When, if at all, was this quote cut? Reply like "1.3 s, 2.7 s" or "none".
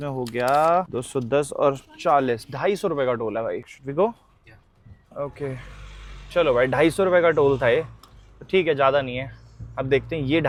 none